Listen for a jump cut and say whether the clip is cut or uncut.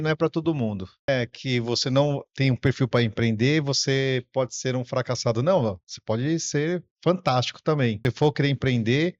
cut